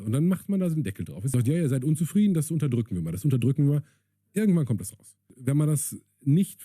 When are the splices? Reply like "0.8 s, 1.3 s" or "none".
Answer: 1.1 s, 5.3 s